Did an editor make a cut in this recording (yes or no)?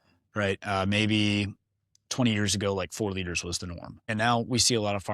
yes